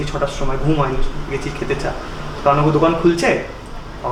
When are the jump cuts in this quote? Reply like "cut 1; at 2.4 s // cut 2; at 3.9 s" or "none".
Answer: none

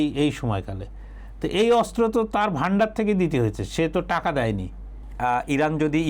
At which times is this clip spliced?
cut 1; at 5.0 s

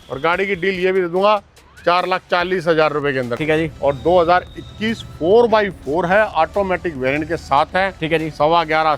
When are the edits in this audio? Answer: cut 1; at 3.4 s

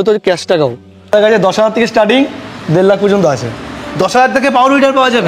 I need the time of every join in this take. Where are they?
cut 1; at 1.1 s

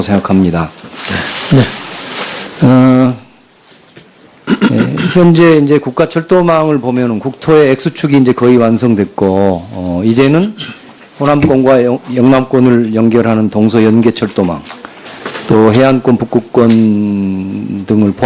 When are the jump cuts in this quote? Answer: cut 1; at 13.1 s

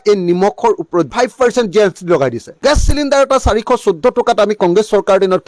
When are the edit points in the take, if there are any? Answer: cut 1; at 1.1 s // cut 2; at 2.5 s

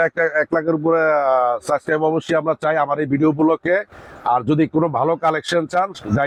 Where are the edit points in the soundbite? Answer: none

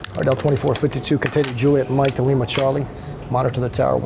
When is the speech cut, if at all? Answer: none

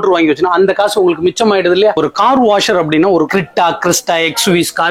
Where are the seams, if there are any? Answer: cut 1; at 2.0 s // cut 2; at 3.3 s

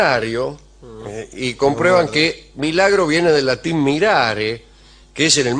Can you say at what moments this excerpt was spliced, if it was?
cut 1; at 4.0 s

